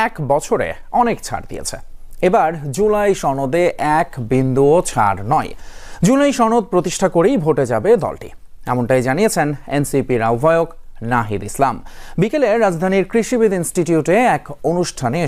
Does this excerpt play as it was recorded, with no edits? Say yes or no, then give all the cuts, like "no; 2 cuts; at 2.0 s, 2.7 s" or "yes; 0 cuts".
yes; 0 cuts